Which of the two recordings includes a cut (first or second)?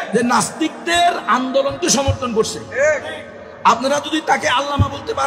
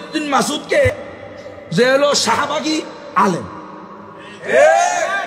second